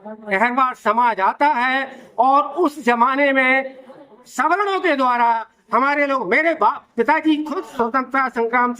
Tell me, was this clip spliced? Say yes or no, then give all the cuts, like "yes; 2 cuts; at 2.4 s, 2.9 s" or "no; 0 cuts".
no; 0 cuts